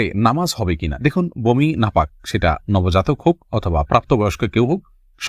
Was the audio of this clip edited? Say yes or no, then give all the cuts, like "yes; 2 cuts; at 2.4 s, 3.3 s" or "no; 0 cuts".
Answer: no; 0 cuts